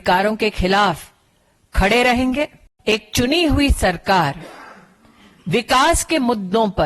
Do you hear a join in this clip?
yes; 1 cut; at 2.7 s

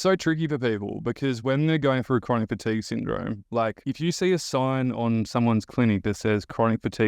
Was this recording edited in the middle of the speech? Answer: yes; 1 cut; at 3.6 s

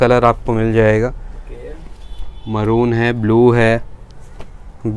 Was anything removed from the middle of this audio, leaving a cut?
no; 0 cuts

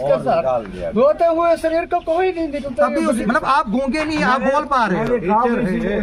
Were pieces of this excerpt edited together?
yes; 1 cut; at 3.2 s

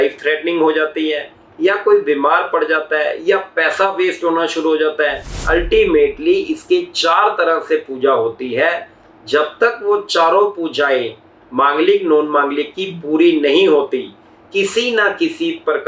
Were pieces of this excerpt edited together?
yes; 1 cut; at 5.3 s

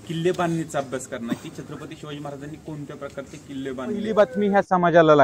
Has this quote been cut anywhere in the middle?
yes; 1 cut; at 4.1 s

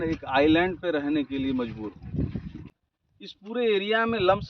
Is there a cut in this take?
yes; 1 cut; at 2.6 s

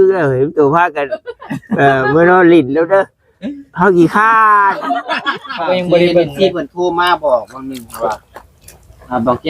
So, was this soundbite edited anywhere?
yes; 1 cut; at 5.5 s

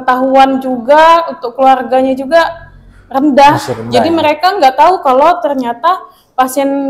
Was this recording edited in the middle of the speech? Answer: no; 0 cuts

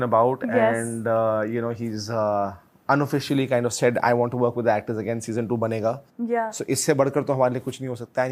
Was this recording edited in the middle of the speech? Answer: no; 0 cuts

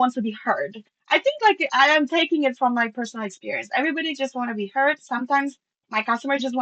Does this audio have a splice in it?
no; 0 cuts

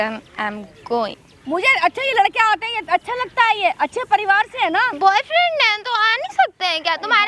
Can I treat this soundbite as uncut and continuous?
no; 1 cut; at 1.3 s

